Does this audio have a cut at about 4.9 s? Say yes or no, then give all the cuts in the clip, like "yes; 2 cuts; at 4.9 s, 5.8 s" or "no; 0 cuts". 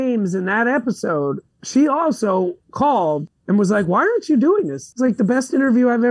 yes; 2 cuts; at 2.6 s, 4.9 s